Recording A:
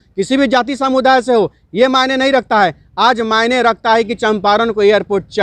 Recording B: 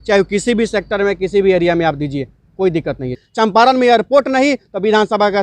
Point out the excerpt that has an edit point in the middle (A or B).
B